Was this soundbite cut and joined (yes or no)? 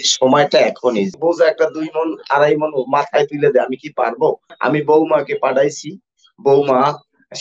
yes